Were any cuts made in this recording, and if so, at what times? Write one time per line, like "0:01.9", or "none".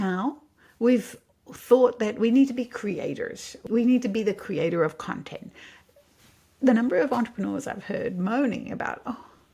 0:03.6